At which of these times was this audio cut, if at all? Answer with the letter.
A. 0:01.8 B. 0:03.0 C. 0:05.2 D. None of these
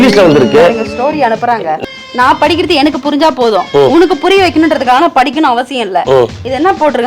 A